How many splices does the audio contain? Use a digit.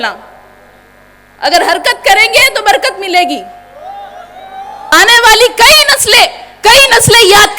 1